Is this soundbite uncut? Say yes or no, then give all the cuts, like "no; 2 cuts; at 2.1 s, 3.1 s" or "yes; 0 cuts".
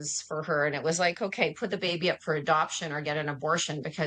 yes; 0 cuts